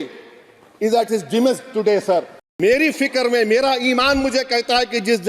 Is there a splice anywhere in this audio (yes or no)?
yes